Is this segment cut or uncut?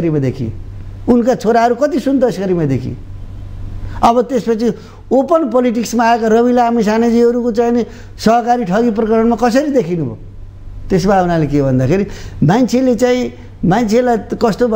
uncut